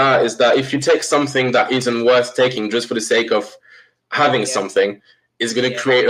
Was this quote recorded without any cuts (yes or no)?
yes